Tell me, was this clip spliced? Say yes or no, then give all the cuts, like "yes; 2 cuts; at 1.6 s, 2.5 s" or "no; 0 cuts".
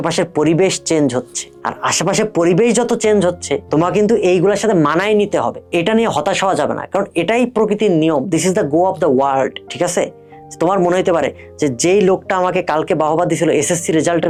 no; 0 cuts